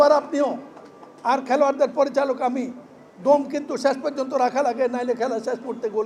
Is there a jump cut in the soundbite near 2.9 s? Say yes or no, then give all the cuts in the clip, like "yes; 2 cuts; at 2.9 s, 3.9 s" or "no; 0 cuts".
no; 0 cuts